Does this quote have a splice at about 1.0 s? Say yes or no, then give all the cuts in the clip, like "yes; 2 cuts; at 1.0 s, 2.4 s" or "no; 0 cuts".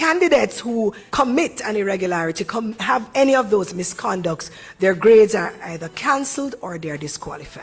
yes; 1 cut; at 1.0 s